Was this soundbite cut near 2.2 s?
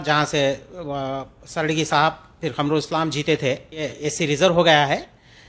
no; 1 cut; at 4.0 s

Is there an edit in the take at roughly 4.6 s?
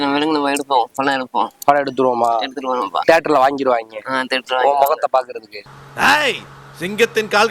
no; 0 cuts

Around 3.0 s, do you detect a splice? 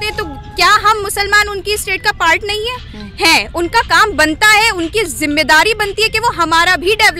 no; 0 cuts

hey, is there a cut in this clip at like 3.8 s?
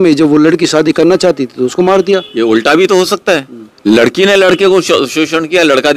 no; 0 cuts

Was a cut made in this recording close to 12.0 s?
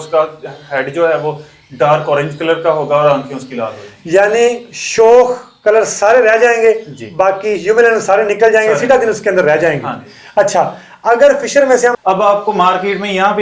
yes; 1 cut; at 12.0 s

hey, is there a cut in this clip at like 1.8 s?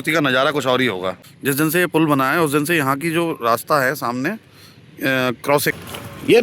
yes; 2 cuts; at 1.8 s, 5.7 s

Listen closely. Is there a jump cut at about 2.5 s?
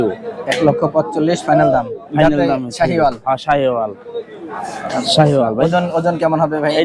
no; 0 cuts

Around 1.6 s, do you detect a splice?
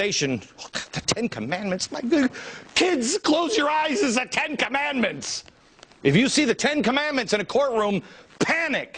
yes; 1 cut; at 1.6 s

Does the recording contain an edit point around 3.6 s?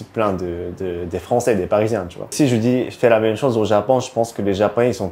no; 1 cut; at 2.3 s

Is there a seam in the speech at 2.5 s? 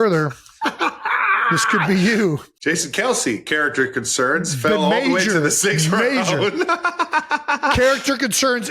yes; 1 cut; at 2.5 s

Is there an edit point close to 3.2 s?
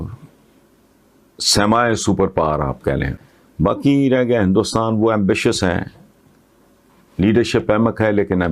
yes; 1 cut; at 3.2 s

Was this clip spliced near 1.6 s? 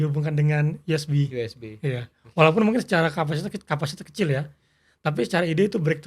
no; 0 cuts

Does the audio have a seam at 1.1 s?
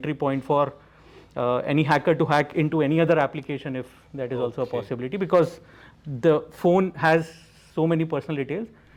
no; 0 cuts

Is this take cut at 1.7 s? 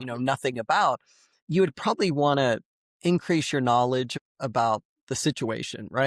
no; 1 cut; at 4.2 s

